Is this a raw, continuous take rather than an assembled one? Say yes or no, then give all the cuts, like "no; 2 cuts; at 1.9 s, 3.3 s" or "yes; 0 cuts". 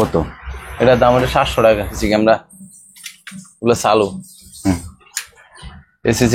no; 1 cut; at 1.9 s